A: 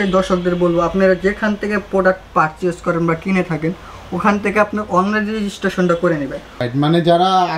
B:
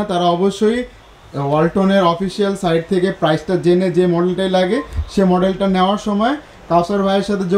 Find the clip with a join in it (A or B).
A